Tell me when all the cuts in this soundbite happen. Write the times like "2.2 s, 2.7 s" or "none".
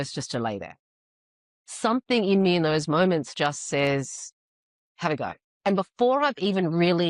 5.5 s